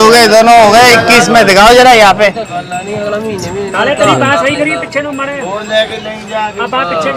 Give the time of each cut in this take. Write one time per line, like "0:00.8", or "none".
none